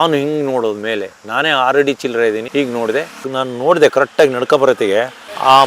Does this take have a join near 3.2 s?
yes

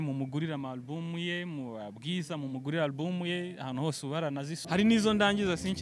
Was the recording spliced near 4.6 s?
yes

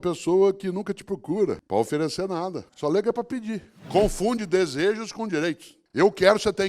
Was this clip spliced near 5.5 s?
no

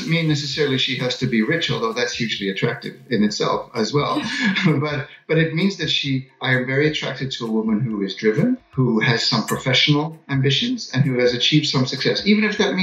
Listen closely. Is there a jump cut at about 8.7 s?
yes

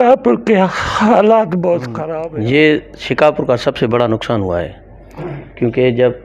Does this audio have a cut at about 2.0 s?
yes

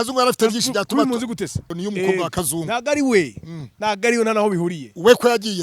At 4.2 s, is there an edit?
no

